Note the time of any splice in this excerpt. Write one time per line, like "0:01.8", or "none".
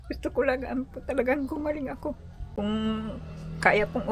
0:02.3